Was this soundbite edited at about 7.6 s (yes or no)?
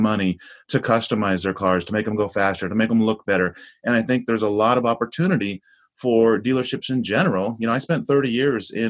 no